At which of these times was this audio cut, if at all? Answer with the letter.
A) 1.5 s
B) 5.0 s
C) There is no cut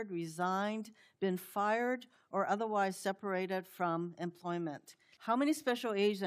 B